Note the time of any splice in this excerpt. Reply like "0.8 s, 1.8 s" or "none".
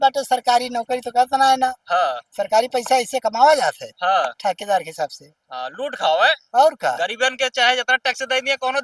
none

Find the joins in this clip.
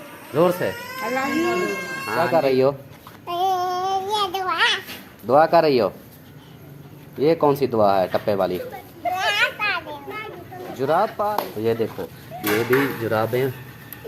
2.0 s, 11.3 s

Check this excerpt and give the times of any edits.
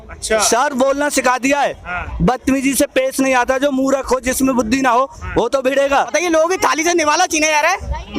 6.1 s

